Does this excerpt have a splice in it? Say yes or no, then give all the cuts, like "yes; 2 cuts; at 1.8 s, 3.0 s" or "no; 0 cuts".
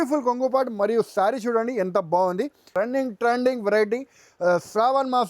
yes; 1 cut; at 2.7 s